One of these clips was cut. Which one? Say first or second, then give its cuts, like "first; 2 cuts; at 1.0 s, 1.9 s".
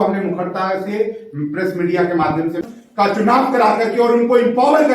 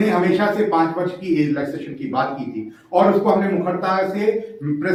first; 1 cut; at 2.6 s